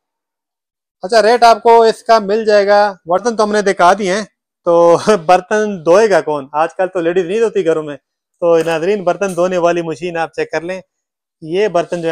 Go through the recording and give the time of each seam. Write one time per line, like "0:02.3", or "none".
0:03.2